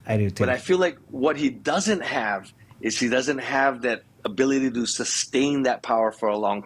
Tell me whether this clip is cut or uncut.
uncut